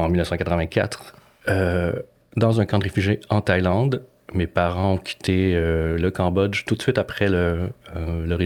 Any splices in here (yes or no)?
no